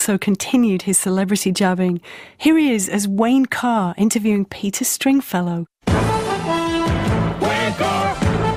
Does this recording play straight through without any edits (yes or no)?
yes